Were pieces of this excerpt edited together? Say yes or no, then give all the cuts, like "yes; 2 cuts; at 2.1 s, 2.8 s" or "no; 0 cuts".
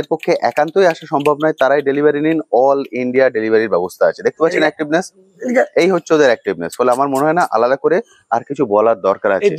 no; 0 cuts